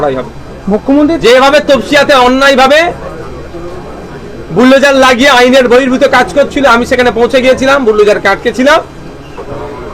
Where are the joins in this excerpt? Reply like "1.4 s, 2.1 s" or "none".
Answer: none

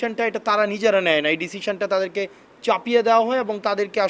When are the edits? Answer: none

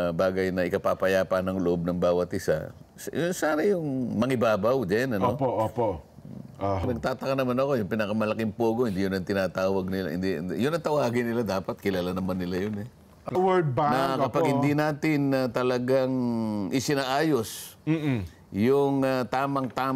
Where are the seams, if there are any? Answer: 6.8 s, 13.3 s

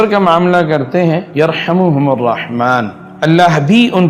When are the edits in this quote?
1.3 s, 3.0 s

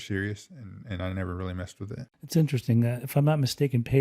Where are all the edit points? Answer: 2.1 s

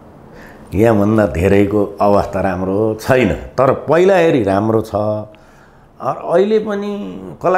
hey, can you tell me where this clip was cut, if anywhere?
none

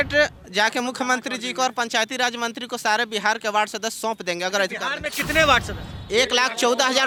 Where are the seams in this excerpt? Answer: none

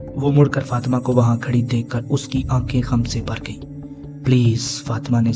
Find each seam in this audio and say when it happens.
none

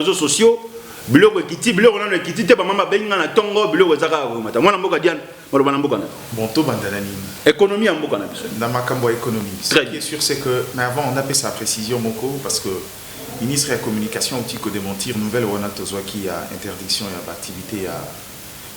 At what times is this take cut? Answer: 6.2 s

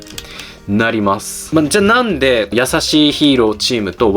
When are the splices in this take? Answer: 1.3 s, 2.5 s

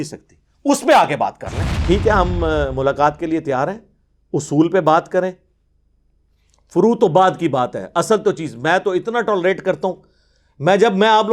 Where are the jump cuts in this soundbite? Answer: 1.8 s

